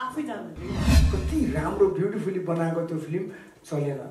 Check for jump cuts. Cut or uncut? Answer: cut